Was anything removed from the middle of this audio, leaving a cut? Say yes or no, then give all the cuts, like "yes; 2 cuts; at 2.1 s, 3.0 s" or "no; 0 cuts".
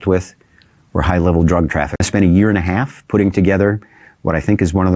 yes; 1 cut; at 2.0 s